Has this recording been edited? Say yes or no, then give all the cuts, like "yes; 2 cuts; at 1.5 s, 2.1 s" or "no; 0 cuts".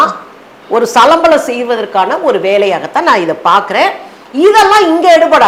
no; 0 cuts